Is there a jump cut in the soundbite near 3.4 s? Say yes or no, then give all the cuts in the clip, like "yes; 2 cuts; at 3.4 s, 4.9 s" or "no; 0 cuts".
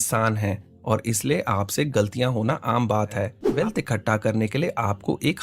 yes; 1 cut; at 3.4 s